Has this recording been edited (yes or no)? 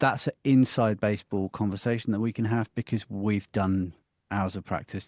no